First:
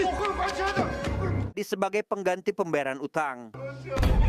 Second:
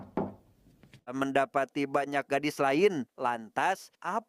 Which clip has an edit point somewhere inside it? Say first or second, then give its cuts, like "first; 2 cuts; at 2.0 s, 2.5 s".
second; 1 cut; at 1.1 s